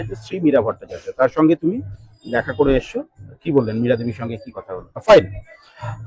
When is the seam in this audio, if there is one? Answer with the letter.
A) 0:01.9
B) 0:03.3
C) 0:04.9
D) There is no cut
C